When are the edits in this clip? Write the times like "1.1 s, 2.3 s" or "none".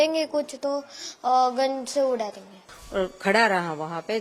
2.7 s